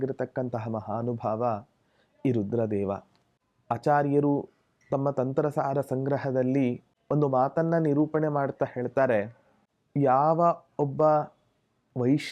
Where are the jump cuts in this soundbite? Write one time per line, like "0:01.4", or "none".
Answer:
0:06.9